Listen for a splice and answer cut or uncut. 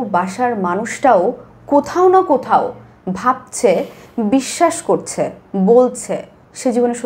uncut